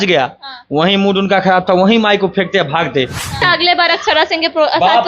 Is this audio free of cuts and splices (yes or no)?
no